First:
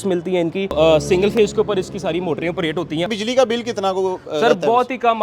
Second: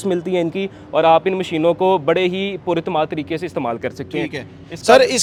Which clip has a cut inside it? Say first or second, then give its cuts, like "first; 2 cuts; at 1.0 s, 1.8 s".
first; 2 cuts; at 0.7 s, 3.1 s